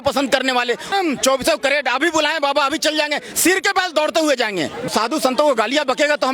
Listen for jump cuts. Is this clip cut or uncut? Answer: cut